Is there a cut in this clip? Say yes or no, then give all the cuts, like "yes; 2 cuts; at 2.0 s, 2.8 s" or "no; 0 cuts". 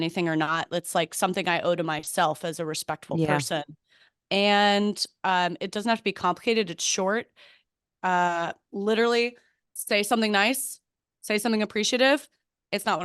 no; 0 cuts